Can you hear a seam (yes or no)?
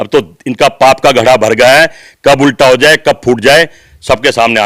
no